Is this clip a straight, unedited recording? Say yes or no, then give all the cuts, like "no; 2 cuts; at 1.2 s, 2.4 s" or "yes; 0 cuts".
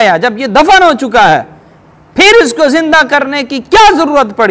yes; 0 cuts